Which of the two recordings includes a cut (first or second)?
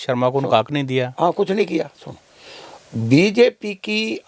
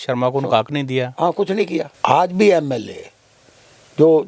second